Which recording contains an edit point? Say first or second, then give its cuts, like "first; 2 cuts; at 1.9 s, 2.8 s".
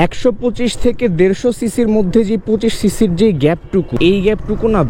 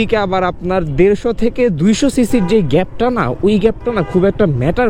first; 1 cut; at 3.9 s